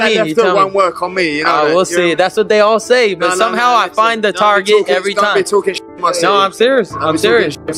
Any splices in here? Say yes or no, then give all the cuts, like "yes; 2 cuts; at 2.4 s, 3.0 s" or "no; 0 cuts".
no; 0 cuts